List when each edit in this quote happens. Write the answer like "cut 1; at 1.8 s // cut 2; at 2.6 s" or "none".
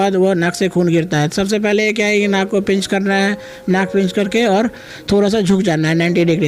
none